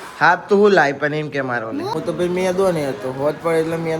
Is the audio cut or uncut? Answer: cut